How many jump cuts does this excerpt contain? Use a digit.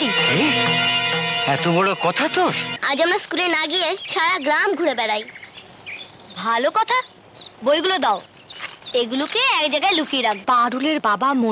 2